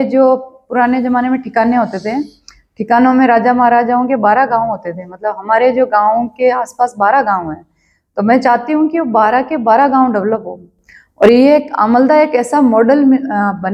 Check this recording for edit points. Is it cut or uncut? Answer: uncut